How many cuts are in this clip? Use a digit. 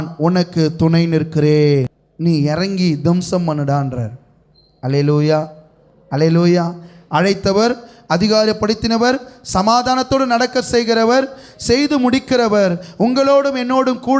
1